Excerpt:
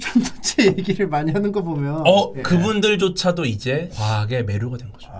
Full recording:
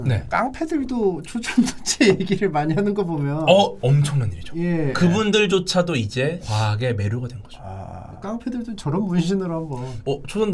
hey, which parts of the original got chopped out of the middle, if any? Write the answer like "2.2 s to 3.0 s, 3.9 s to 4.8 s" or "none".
3.8 s to 4.9 s